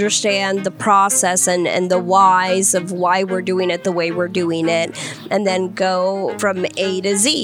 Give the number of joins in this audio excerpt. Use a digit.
1